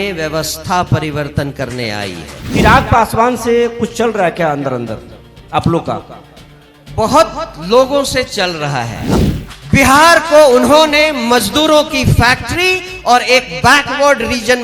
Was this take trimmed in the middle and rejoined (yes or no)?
yes